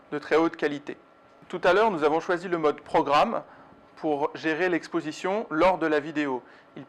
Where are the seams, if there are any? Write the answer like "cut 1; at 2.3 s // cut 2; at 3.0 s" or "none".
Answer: cut 1; at 5.9 s